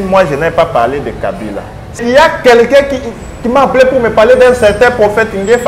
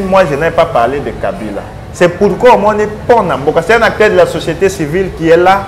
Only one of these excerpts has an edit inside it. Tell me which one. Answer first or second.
first